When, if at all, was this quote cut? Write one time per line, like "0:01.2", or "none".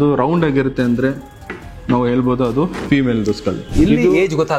0:03.7